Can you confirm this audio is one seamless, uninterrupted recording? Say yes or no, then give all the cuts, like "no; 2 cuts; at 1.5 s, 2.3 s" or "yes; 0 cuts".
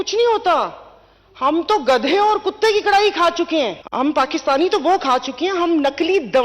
no; 1 cut; at 3.8 s